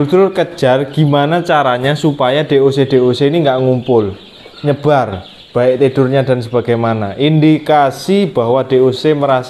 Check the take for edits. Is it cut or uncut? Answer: uncut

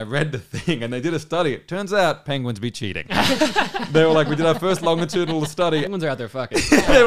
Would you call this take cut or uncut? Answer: cut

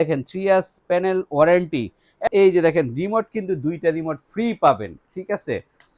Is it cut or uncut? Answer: cut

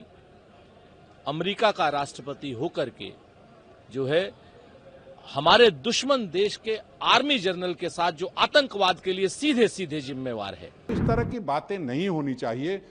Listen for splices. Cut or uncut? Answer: cut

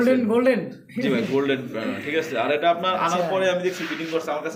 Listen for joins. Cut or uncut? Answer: uncut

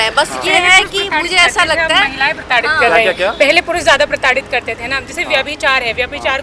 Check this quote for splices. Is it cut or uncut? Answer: uncut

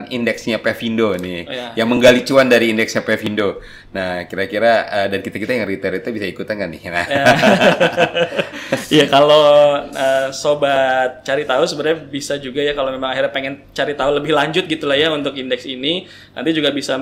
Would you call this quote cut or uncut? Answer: uncut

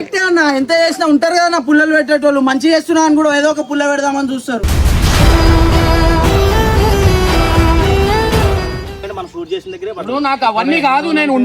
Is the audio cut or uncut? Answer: cut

